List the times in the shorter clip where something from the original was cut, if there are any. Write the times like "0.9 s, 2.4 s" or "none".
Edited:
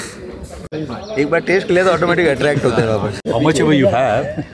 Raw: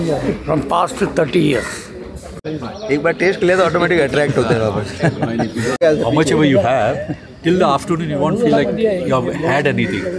3.3 s